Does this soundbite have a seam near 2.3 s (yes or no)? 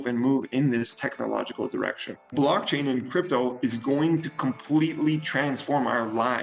yes